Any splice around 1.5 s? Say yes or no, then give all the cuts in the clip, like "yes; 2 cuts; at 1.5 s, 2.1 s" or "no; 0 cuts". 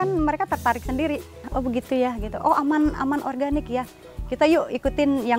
yes; 1 cut; at 1.5 s